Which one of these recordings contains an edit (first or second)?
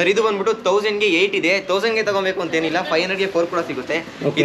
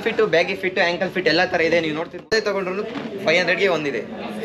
second